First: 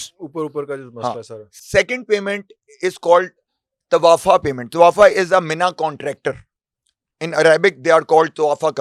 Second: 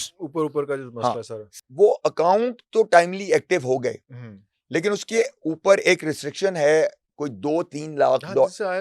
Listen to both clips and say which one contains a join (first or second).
second